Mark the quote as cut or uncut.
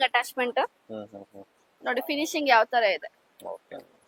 uncut